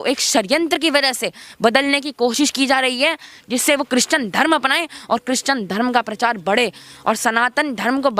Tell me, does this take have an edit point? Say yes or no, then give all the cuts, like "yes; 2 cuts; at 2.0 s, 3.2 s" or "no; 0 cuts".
no; 0 cuts